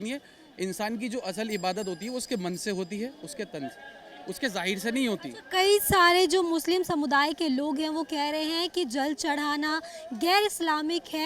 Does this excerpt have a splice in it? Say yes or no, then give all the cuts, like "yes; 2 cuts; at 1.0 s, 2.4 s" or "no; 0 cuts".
no; 0 cuts